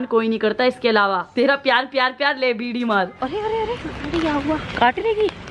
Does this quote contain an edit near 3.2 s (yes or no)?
yes